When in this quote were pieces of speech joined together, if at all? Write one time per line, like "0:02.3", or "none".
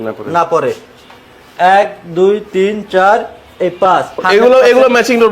0:04.2

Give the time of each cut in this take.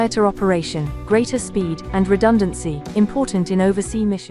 none

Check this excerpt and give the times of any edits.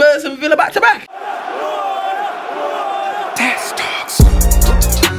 0:01.1

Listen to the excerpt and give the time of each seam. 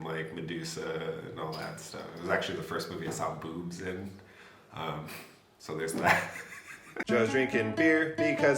0:06.9

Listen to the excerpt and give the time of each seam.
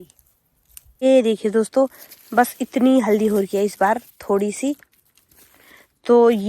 0:01.0

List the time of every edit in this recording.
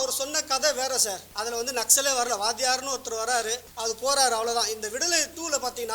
0:01.3
0:03.7

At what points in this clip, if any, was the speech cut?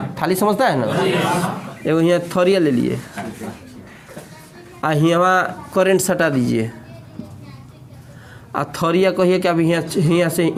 none

